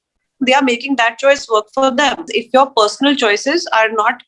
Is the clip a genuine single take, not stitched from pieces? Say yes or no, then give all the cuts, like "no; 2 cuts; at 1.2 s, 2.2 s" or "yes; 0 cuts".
no; 1 cut; at 2.4 s